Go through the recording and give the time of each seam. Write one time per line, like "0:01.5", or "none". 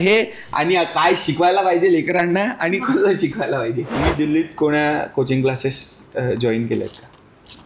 0:03.9